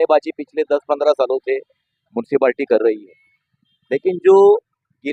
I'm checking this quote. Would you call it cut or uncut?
uncut